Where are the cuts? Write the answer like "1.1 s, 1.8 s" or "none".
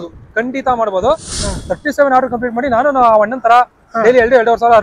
1.4 s